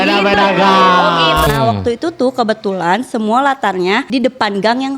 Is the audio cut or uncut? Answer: cut